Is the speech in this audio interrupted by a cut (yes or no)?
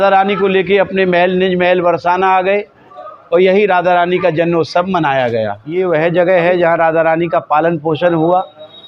yes